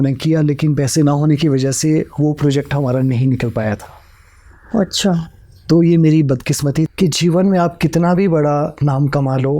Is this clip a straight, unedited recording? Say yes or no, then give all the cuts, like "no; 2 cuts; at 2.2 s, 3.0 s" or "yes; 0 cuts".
no; 1 cut; at 6.9 s